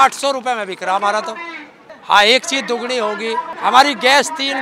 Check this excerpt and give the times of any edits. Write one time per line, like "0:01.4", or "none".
0:01.9
0:03.5